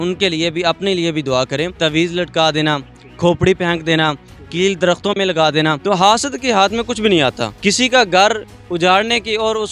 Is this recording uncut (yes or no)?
no